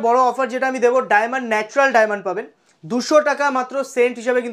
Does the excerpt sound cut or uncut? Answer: uncut